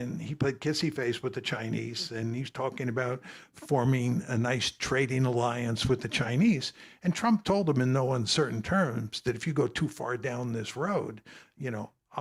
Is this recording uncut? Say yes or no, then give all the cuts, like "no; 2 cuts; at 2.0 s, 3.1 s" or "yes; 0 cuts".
yes; 0 cuts